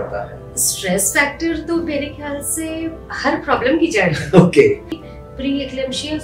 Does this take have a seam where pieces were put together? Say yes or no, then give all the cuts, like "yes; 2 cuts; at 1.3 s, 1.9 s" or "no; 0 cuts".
yes; 1 cut; at 4.9 s